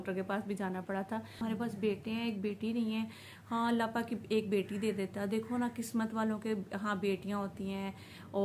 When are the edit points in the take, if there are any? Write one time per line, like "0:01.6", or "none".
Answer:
0:01.4